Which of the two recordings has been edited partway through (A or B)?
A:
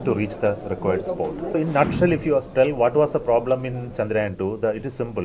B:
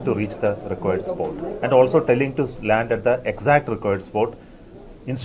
A